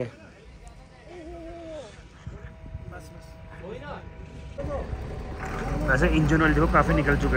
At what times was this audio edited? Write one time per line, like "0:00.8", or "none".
0:04.6